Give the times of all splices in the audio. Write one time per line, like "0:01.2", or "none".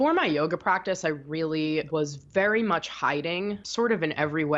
0:02.0
0:03.6